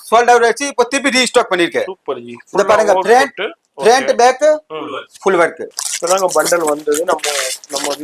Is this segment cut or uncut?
cut